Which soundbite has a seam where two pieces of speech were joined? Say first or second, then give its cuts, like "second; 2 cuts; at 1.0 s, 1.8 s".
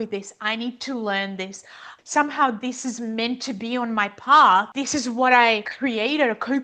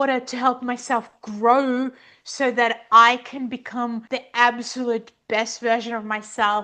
first; 2 cuts; at 2.0 s, 5.6 s